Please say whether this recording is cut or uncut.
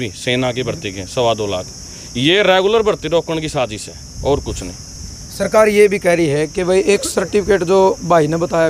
uncut